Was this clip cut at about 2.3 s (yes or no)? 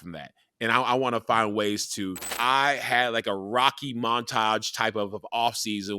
yes